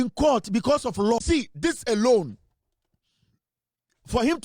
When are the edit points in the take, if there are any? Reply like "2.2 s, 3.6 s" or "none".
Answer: 1.2 s